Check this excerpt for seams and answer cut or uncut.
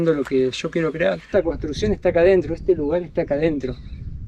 cut